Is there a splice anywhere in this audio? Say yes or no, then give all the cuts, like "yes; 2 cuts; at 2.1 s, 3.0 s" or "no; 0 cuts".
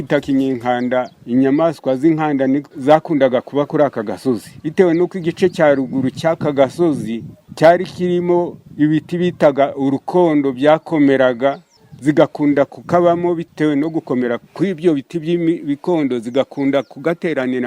yes; 3 cuts; at 1.2 s, 2.7 s, 4.6 s